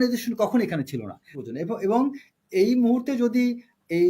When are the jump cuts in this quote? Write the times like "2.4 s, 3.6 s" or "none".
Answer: 1.3 s